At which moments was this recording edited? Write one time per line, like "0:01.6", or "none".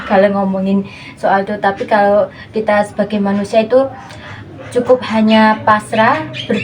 none